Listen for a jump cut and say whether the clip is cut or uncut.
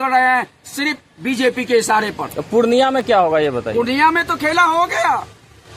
uncut